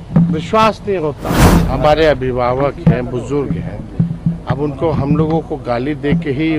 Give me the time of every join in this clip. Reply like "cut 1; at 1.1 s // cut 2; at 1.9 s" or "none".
cut 1; at 1.4 s